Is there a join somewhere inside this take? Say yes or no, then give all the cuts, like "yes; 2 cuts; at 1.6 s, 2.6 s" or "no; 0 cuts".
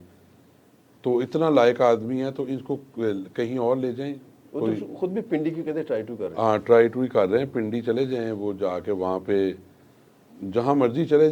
no; 0 cuts